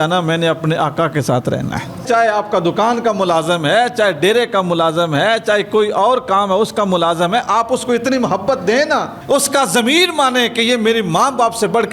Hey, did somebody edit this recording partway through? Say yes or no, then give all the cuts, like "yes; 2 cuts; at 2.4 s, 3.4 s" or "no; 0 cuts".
yes; 1 cut; at 2.0 s